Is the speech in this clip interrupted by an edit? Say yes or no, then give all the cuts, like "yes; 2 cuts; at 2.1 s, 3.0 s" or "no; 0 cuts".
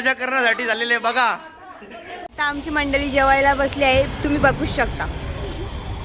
yes; 1 cut; at 2.3 s